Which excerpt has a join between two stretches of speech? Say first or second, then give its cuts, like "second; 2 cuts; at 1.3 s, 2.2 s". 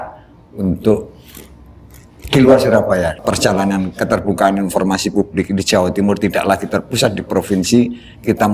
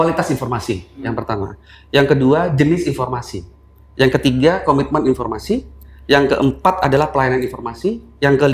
first; 1 cut; at 3.2 s